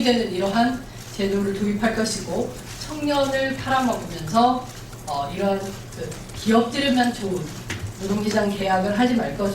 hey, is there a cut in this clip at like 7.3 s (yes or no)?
no